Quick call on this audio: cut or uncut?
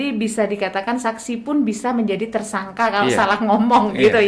uncut